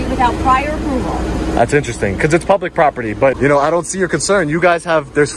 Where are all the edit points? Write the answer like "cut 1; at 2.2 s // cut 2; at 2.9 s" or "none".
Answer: cut 1; at 3.4 s